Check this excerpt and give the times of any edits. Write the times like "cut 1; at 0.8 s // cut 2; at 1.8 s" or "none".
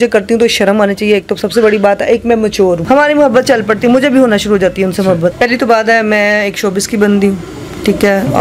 cut 1; at 2.8 s // cut 2; at 5.3 s